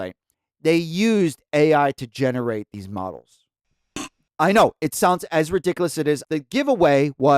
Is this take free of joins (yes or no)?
no